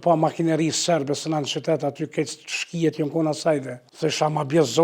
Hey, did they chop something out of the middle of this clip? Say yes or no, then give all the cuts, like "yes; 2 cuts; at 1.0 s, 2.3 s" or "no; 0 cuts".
yes; 1 cut; at 3.8 s